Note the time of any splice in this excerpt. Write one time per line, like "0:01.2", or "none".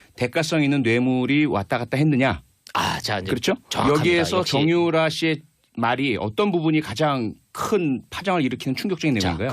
none